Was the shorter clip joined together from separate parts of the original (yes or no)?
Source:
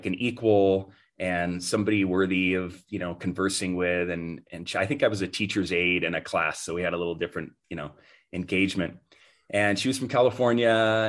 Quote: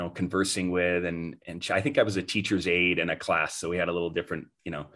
no